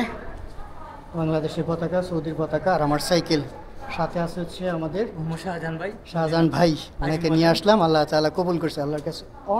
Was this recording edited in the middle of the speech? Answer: no; 0 cuts

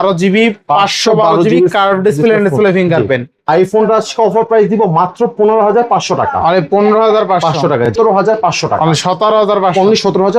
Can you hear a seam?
yes; 2 cuts; at 3.3 s, 7.9 s

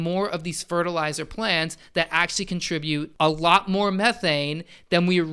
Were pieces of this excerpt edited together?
yes; 1 cut; at 3.1 s

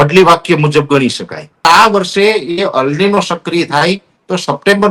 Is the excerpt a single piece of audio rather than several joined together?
no; 1 cut; at 1.4 s

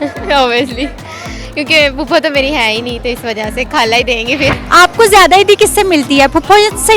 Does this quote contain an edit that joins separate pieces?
yes; 1 cut; at 4.6 s

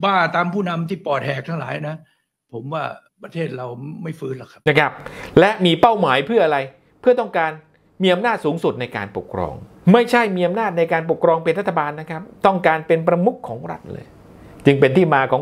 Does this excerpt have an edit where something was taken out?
yes; 1 cut; at 4.7 s

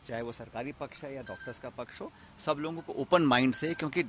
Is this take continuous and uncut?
yes; 0 cuts

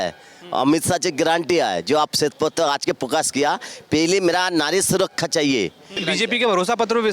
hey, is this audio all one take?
no; 1 cut; at 6.0 s

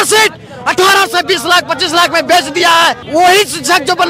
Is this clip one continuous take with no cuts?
no; 1 cut; at 3.0 s

